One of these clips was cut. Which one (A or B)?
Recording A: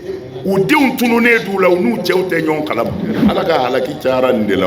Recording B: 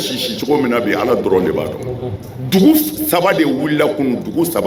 A